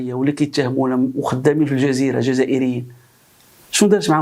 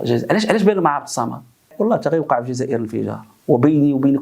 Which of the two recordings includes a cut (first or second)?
second